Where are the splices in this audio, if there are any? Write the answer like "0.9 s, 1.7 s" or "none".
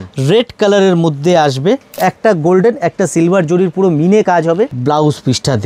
2.0 s, 4.8 s